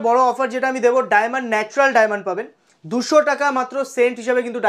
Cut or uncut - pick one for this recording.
uncut